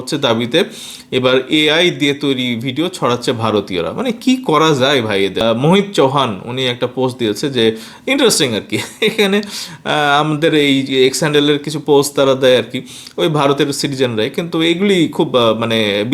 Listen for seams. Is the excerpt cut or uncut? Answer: cut